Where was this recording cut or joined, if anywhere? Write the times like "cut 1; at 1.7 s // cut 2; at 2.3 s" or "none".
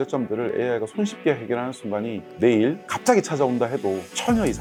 none